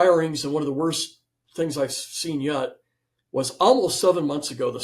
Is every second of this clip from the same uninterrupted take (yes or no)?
yes